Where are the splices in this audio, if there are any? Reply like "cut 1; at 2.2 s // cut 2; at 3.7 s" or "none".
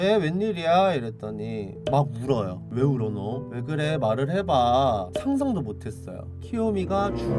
none